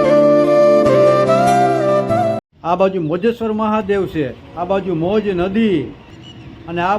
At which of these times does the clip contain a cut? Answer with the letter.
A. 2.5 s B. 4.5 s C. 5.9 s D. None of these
A